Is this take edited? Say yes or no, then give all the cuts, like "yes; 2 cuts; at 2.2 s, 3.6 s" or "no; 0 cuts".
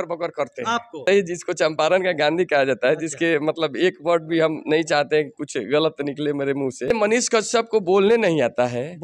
yes; 2 cuts; at 1.0 s, 6.9 s